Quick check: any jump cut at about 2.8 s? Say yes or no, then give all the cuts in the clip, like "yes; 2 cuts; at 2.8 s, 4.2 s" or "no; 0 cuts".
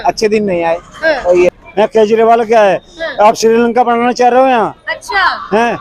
no; 1 cut; at 1.5 s